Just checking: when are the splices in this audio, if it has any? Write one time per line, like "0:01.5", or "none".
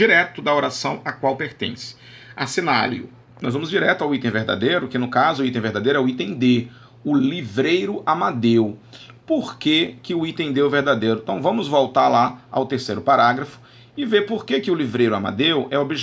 0:10.5